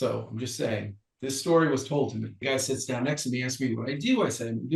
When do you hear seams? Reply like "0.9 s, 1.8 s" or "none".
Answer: 2.4 s